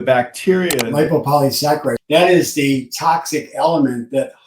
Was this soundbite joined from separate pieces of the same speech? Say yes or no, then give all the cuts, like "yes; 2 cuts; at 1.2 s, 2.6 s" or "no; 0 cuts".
yes; 2 cuts; at 0.8 s, 2.0 s